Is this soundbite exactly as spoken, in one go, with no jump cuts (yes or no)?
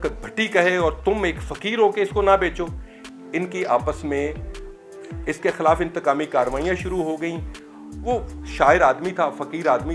yes